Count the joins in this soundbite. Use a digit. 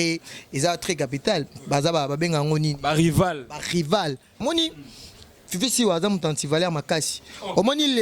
1